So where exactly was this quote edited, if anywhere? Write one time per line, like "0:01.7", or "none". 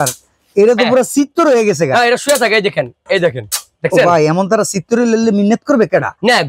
none

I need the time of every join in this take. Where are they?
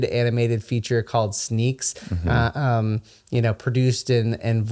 none

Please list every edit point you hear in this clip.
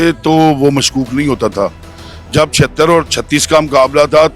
none

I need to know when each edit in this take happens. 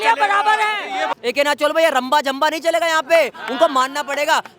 0:01.1

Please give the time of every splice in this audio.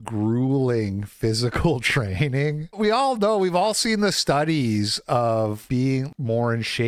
none

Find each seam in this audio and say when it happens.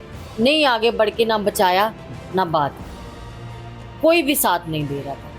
none

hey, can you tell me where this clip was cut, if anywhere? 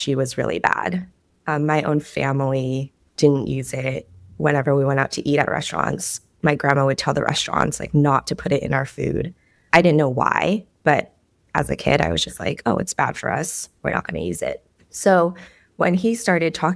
none

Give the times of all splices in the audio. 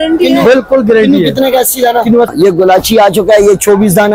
0:02.3

